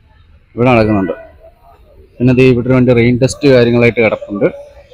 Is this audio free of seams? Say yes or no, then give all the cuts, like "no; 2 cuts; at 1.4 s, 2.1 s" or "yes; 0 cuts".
yes; 0 cuts